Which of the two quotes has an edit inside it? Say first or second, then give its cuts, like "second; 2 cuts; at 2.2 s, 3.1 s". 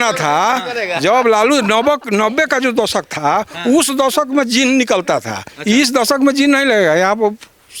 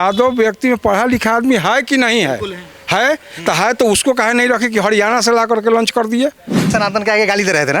second; 1 cut; at 6.7 s